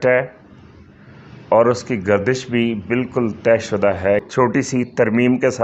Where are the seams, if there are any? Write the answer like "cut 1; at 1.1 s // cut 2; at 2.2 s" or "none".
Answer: cut 1; at 4.3 s